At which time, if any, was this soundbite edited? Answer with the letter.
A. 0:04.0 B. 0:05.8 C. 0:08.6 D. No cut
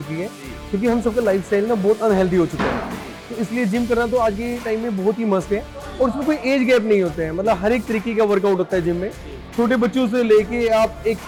D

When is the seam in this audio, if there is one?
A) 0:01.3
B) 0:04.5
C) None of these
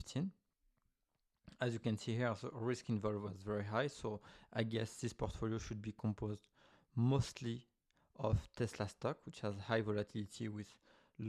C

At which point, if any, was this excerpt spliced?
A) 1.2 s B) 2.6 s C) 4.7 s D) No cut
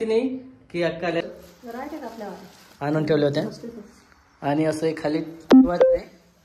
A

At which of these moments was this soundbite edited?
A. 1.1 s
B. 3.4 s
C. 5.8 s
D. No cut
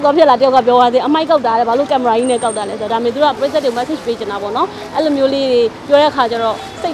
B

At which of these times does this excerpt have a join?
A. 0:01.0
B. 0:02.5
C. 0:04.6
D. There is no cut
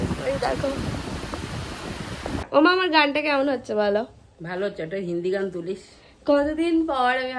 B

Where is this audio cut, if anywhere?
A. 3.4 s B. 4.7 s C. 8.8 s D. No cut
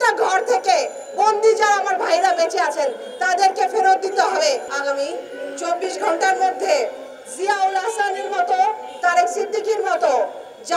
B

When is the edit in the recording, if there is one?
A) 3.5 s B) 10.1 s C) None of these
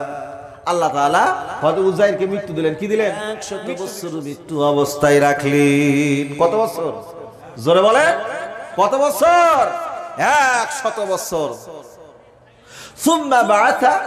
A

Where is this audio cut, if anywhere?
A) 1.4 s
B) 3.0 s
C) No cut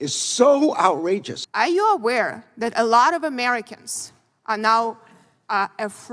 A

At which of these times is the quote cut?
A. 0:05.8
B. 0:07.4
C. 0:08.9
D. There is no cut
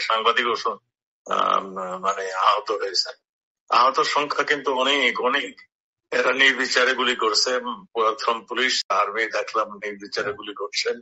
C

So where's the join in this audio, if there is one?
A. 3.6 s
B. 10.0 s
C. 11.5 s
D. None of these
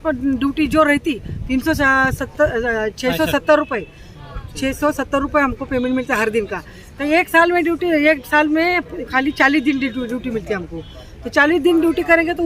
D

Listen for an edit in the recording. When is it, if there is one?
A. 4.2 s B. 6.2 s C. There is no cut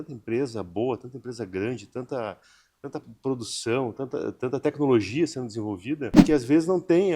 B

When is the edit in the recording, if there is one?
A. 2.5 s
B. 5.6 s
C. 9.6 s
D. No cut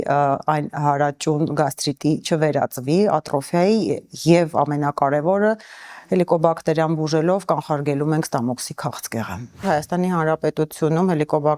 C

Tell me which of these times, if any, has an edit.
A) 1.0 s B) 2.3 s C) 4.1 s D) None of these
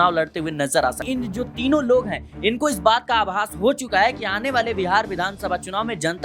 A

